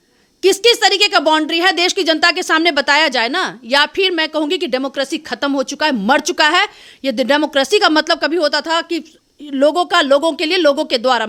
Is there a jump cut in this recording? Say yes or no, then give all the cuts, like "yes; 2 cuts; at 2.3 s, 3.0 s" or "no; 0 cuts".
no; 0 cuts